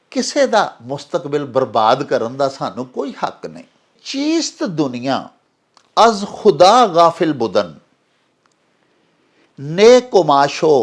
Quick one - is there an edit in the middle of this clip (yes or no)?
yes